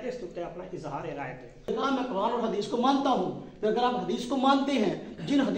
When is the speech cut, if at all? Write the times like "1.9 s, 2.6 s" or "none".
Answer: 1.7 s